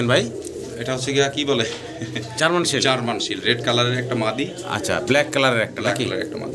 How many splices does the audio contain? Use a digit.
0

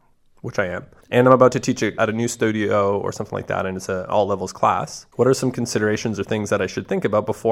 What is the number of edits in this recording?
3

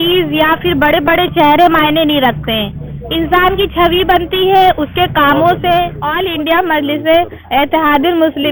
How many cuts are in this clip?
1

